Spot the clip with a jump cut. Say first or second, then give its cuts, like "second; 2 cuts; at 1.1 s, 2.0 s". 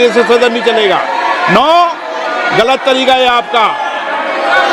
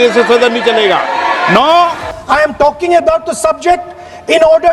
second; 1 cut; at 2.1 s